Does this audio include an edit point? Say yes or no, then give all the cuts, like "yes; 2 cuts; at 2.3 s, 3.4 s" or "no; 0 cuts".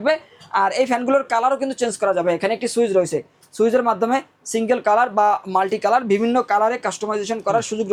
no; 0 cuts